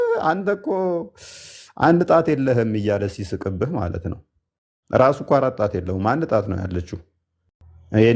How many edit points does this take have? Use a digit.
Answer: 0